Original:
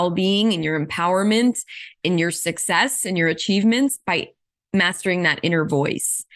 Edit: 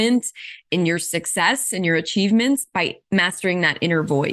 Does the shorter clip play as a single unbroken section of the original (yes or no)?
no